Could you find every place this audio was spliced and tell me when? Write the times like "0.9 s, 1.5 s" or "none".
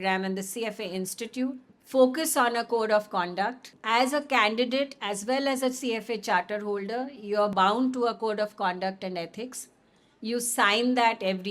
1.7 s, 3.7 s